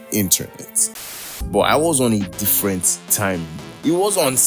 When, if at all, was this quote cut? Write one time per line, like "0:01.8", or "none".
0:01.4